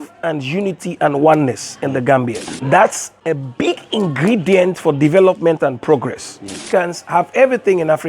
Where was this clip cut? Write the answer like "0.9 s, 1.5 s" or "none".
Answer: 2.5 s, 3.1 s, 6.6 s